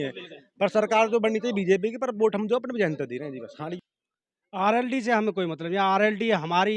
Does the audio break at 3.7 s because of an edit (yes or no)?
yes